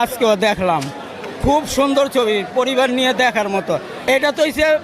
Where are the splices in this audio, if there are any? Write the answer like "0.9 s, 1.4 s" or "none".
3.9 s